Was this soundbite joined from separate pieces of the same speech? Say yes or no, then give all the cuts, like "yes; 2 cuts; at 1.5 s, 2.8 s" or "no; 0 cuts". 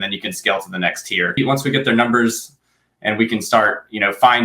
yes; 1 cut; at 1.4 s